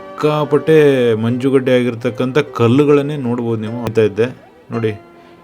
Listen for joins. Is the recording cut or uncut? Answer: cut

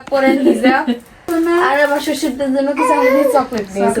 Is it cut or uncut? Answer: cut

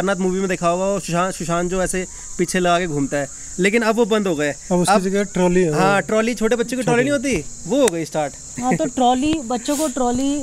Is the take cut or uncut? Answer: uncut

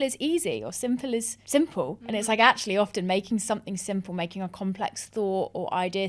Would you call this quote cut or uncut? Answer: uncut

